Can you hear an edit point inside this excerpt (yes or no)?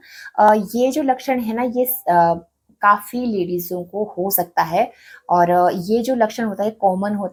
no